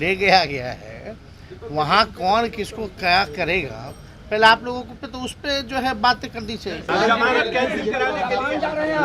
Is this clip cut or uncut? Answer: uncut